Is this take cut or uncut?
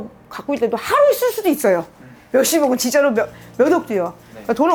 uncut